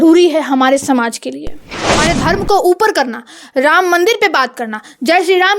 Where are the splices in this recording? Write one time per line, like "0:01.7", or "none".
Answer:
0:02.0